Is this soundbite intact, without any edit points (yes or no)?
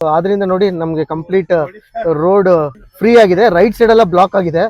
no